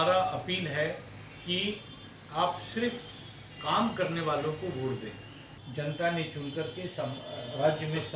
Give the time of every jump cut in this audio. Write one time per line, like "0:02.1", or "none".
0:05.6